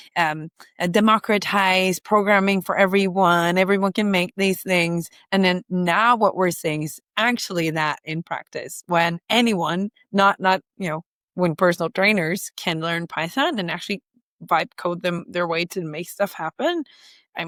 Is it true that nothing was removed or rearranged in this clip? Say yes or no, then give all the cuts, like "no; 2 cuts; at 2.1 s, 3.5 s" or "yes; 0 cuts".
yes; 0 cuts